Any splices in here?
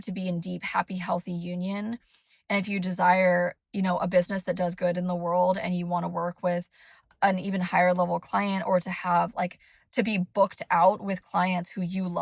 no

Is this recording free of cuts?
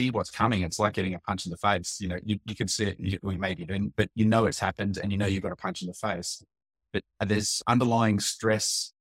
yes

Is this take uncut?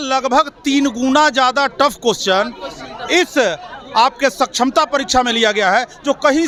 yes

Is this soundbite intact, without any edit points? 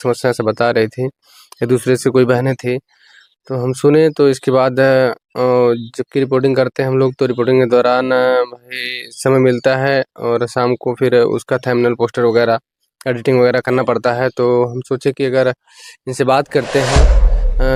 yes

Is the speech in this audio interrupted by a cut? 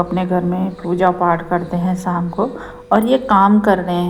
no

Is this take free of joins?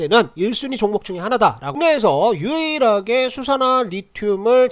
no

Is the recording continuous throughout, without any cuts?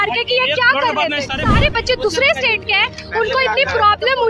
no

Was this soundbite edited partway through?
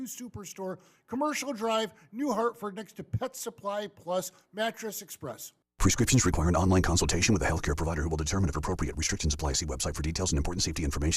yes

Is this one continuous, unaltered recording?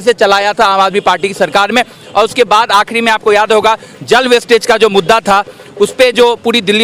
yes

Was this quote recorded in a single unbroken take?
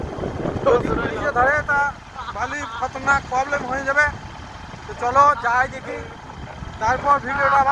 yes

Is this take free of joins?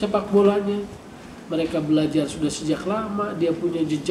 yes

